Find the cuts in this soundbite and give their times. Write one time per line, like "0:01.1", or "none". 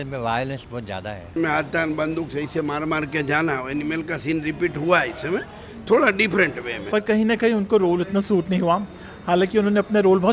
0:01.3
0:06.8